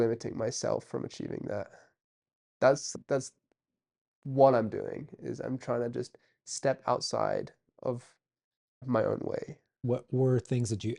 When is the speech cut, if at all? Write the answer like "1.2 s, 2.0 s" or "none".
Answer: 2.9 s, 8.8 s, 9.8 s